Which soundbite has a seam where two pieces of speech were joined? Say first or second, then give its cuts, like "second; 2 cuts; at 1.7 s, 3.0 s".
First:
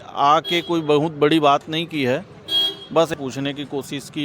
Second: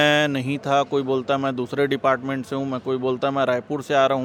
first; 1 cut; at 3.2 s